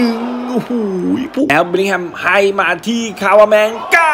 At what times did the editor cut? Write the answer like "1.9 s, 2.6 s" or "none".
1.5 s